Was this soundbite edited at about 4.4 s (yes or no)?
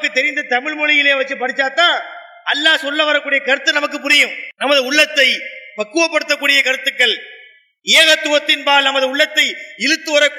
yes